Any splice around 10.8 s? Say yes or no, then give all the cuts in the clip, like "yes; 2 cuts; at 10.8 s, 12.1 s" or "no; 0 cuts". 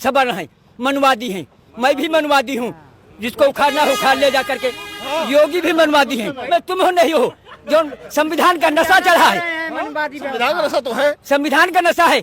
no; 1 cut; at 6.4 s